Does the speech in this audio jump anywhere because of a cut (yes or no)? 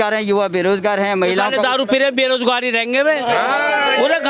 no